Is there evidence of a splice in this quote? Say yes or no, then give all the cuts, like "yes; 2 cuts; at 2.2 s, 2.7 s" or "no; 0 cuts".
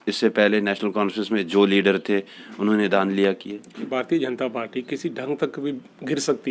yes; 1 cut; at 3.7 s